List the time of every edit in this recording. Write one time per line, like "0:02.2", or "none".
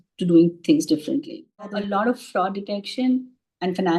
0:01.8

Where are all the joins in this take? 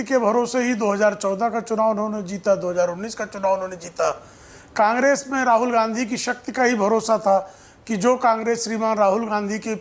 none

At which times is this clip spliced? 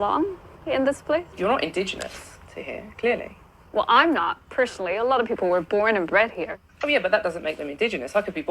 0:01.3

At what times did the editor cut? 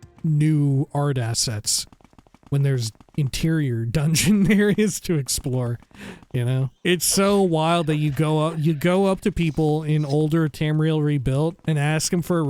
0:06.8
0:11.6

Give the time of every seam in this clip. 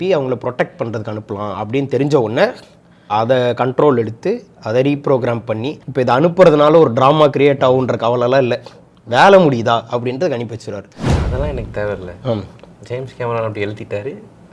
0:05.7

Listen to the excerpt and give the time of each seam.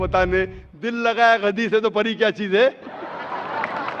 none

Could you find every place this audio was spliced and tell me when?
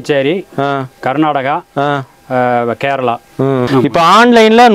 0:03.7

